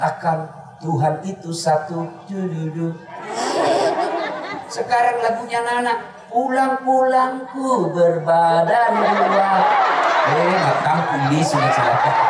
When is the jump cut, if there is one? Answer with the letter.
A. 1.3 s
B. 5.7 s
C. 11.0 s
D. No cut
D